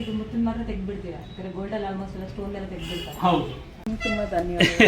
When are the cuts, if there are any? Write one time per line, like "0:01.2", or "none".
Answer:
0:03.9

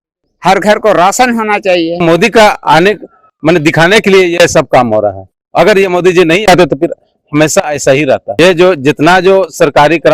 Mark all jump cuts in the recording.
0:02.0
0:08.4

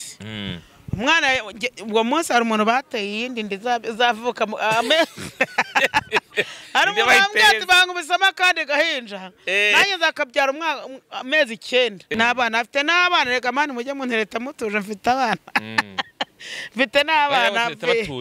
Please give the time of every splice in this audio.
0:12.0

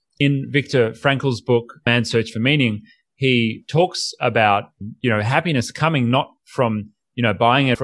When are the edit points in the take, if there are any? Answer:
none

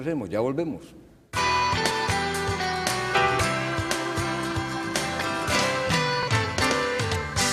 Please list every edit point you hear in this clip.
0:02.9

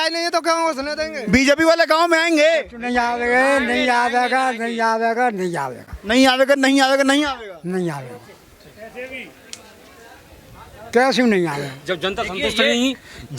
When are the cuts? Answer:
none

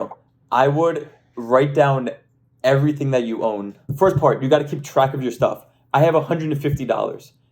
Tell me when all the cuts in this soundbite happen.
0:03.8

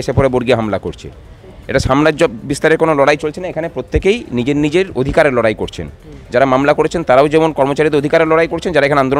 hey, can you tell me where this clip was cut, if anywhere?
none

